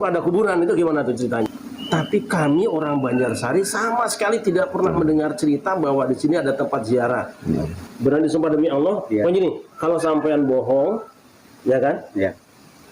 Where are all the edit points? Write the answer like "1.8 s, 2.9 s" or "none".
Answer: 1.5 s, 7.8 s

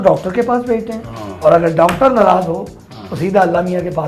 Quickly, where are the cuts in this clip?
none

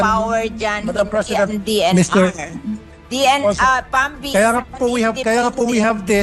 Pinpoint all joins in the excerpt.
none

